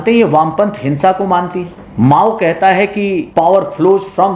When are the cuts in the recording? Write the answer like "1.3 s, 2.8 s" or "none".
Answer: 1.8 s, 3.2 s